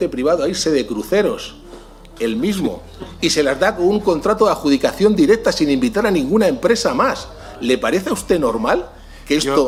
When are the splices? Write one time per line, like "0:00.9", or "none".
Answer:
none